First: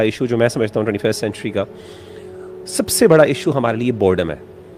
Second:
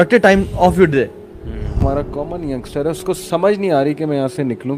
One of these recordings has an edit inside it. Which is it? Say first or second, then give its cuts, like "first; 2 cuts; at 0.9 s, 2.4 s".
second; 1 cut; at 1.8 s